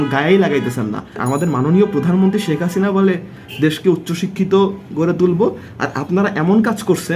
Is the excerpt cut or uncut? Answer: uncut